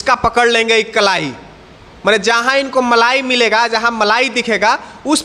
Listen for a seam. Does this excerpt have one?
no; 0 cuts

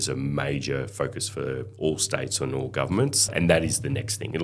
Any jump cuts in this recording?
yes; 1 cut; at 3.3 s

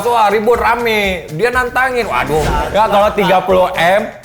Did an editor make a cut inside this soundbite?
yes; 1 cut; at 2.7 s

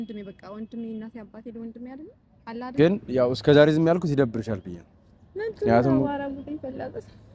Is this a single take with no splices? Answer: no; 1 cut; at 2.7 s

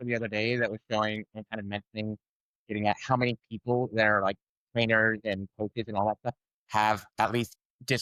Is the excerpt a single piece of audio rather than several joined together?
yes; 0 cuts

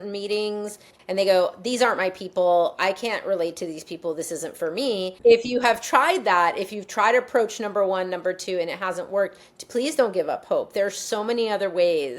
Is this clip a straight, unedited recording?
no; 2 cuts; at 0.9 s, 5.1 s

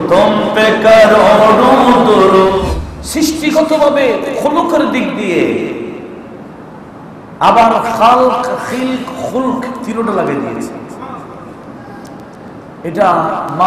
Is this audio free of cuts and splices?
no; 1 cut; at 2.6 s

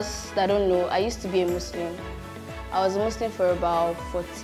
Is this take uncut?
yes; 0 cuts

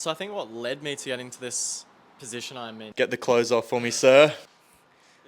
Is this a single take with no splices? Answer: no; 1 cut; at 2.8 s

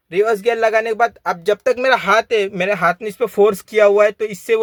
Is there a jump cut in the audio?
no; 0 cuts

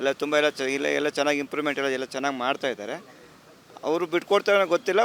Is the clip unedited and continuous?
yes; 0 cuts

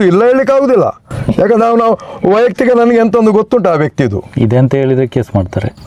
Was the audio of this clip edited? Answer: no; 0 cuts

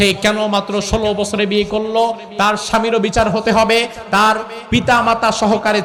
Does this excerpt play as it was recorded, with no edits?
yes; 0 cuts

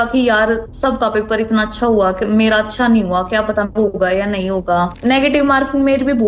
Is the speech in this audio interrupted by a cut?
yes; 1 cut; at 5.0 s

